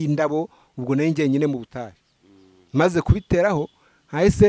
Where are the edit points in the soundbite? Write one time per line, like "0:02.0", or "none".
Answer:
none

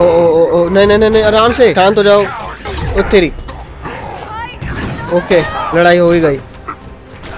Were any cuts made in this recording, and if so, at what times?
0:01.7
0:04.6

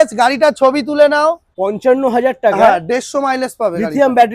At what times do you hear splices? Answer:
0:01.5

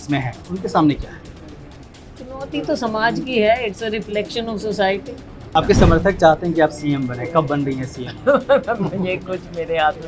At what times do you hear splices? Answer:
0:05.5

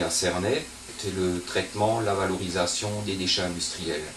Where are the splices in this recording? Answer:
0:00.9

